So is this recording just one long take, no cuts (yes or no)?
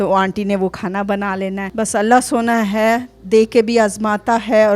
no